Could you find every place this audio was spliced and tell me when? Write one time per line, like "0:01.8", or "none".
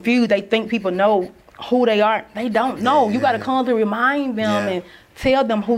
none